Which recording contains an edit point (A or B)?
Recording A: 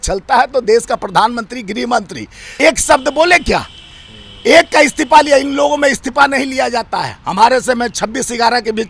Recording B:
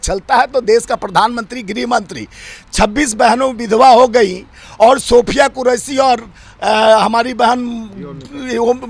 A